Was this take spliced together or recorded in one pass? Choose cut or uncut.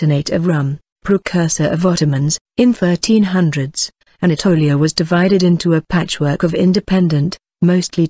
cut